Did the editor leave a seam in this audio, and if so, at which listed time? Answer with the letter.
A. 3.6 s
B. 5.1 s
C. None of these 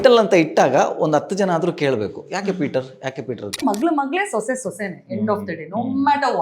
A